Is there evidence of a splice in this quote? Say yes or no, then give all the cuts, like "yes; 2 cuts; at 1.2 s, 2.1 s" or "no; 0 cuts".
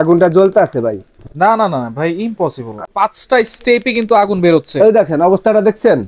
yes; 1 cut; at 2.9 s